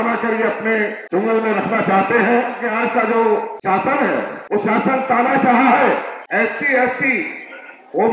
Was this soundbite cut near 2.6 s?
yes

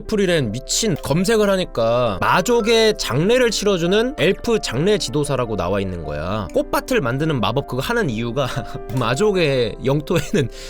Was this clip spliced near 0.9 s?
no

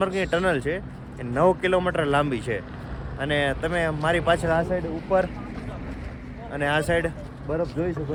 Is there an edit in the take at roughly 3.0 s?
no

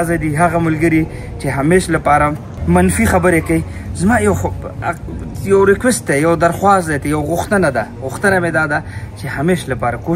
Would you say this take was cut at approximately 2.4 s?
no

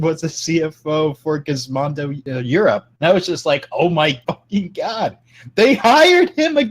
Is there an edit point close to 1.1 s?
no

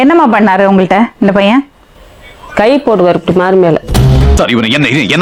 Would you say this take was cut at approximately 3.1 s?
no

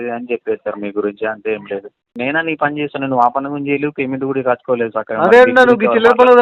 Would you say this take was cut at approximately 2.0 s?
yes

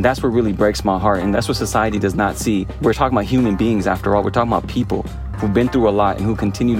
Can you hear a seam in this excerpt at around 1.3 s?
yes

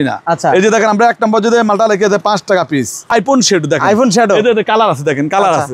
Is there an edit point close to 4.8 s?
no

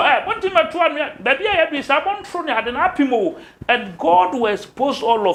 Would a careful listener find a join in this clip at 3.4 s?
no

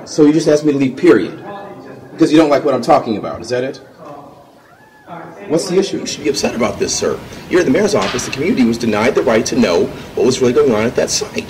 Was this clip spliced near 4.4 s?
no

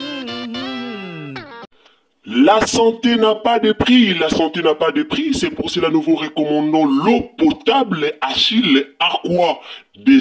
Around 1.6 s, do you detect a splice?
yes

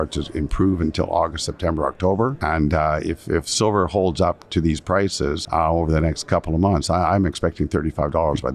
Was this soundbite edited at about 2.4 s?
yes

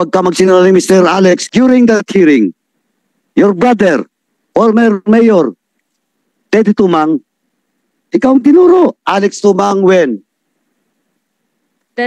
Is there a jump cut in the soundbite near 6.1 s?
no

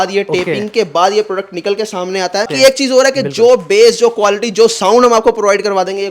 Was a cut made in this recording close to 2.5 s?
yes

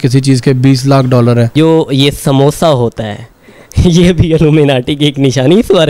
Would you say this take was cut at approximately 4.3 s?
no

